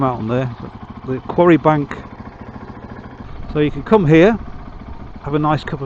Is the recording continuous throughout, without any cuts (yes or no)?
no